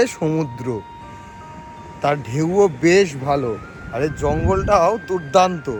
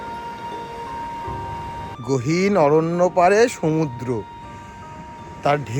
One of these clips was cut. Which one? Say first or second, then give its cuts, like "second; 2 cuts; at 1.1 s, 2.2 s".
second; 1 cut; at 1.9 s